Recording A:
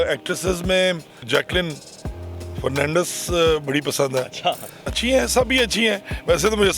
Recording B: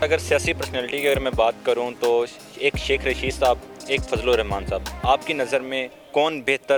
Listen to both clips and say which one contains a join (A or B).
A